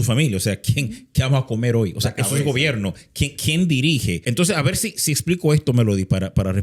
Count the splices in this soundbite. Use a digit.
1